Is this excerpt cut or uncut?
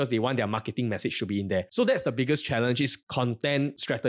cut